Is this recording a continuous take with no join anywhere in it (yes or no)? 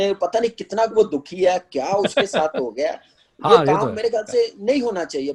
yes